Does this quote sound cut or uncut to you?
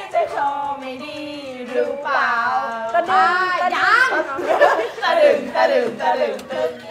uncut